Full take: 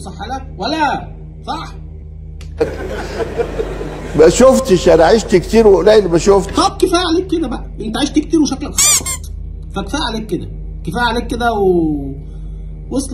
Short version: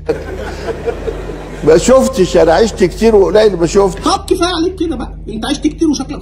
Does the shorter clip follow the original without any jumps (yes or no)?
yes